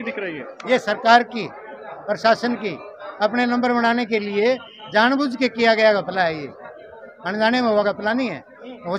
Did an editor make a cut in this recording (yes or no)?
no